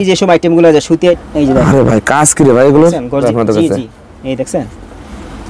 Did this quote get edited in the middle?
yes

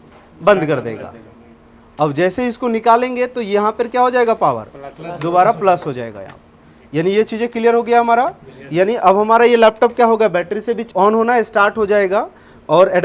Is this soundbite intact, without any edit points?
no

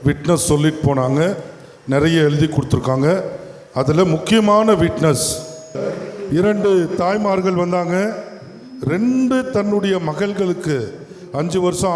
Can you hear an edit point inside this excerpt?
yes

